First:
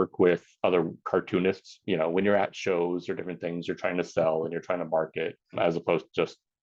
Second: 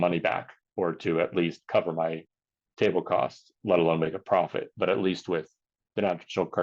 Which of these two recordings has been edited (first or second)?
first